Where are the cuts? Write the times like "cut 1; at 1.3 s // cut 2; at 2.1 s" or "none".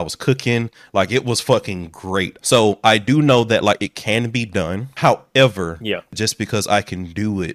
cut 1; at 2.3 s // cut 2; at 4.8 s // cut 3; at 6.1 s